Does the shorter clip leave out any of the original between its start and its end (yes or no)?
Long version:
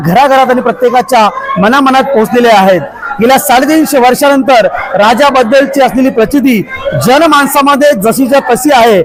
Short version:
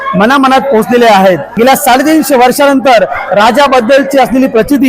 yes